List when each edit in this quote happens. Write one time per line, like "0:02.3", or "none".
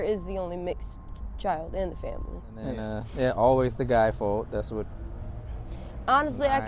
0:02.8